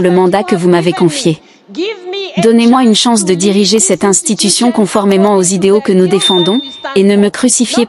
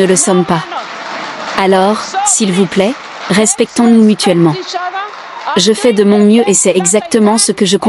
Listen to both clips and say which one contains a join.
first; 1 cut; at 6.8 s

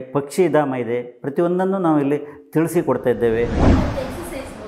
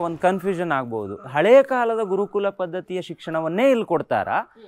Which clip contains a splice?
first; 1 cut; at 3.7 s

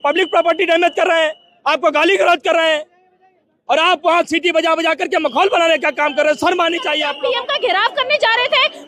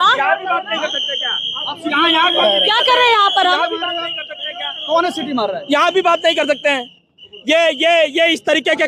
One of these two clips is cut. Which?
first; 1 cut; at 7.1 s

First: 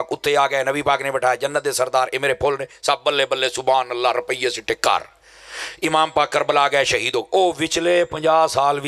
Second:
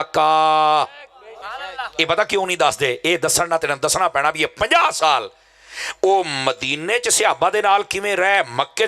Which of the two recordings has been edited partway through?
second; 1 cut; at 1.4 s

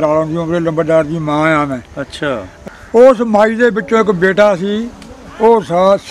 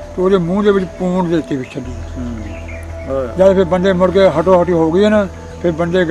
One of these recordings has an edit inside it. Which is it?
first; 1 cut; at 2.5 s

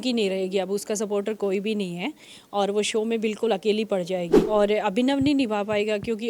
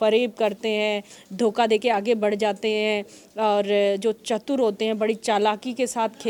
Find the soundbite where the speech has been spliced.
first; 1 cut; at 4.4 s

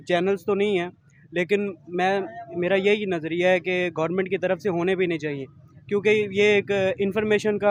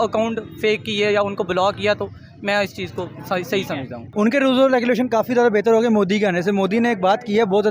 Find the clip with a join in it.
second; 1 cut; at 4.0 s

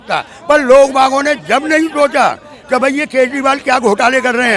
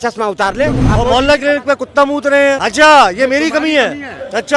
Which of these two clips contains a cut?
second; 2 cuts; at 0.8 s, 2.6 s

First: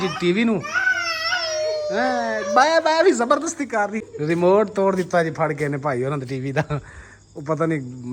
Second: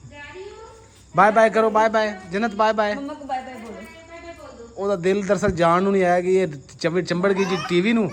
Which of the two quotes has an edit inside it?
first; 1 cut; at 4.0 s

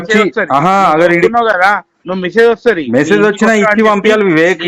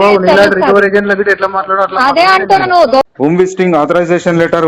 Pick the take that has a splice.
second; 1 cut; at 3.1 s

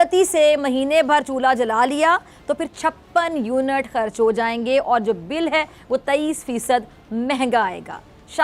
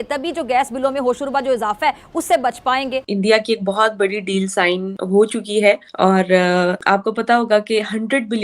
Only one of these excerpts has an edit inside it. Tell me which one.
second; 4 cuts; at 3.1 s, 4.9 s, 5.9 s, 6.8 s

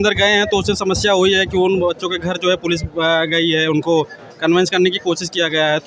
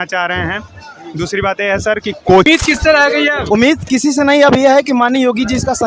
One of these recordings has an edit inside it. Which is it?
second; 1 cut; at 2.5 s

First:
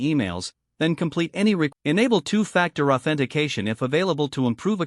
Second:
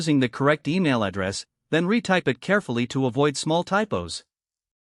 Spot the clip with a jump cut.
first; 1 cut; at 1.7 s

